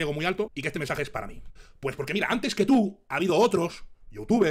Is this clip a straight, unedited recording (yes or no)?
no